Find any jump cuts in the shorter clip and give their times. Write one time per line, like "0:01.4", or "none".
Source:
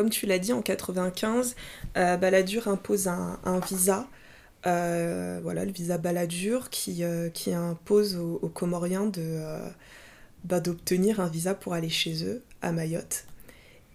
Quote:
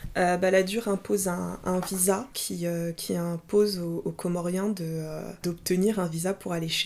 0:02.4
0:05.4